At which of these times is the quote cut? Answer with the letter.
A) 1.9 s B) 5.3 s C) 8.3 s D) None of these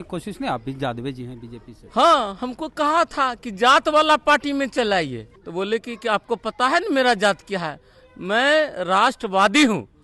B